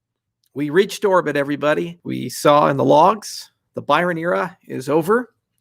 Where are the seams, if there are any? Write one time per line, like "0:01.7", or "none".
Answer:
0:02.0